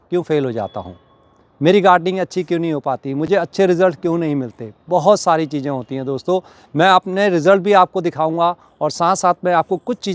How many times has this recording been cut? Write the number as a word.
zero